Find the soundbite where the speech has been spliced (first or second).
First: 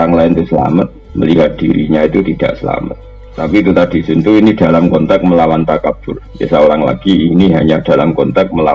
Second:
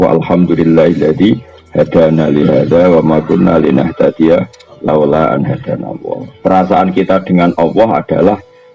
first